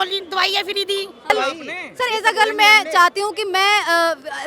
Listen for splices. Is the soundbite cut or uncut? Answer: cut